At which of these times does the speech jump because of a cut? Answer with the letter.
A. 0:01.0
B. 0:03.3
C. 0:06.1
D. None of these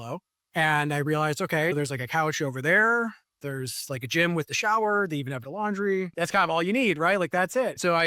C